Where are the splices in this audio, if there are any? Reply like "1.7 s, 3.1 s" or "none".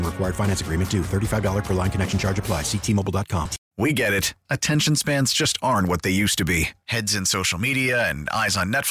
3.6 s